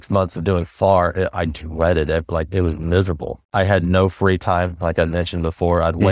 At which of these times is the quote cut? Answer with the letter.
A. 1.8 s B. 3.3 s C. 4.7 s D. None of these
B